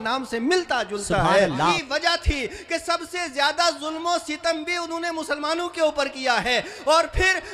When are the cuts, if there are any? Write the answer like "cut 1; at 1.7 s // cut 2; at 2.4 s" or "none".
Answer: cut 1; at 1.8 s